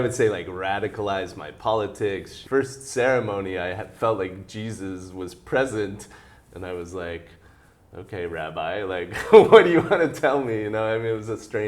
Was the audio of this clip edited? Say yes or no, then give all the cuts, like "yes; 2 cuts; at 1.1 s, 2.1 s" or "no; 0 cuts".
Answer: yes; 1 cut; at 2.3 s